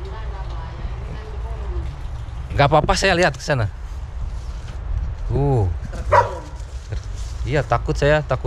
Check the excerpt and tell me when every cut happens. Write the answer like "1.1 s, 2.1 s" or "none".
none